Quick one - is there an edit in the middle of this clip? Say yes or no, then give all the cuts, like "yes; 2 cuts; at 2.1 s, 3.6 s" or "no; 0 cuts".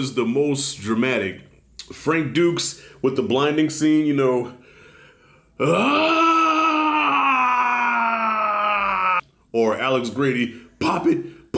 yes; 1 cut; at 9.2 s